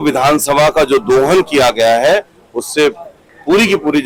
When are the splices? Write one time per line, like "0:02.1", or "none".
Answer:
none